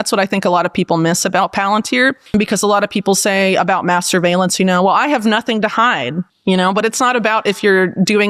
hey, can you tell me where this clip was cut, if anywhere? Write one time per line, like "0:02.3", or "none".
none